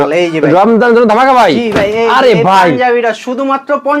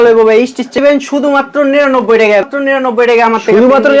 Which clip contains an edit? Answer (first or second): second